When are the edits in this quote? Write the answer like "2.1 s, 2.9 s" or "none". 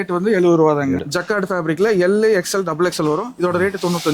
1.0 s